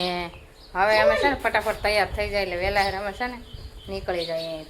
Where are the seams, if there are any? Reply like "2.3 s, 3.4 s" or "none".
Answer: none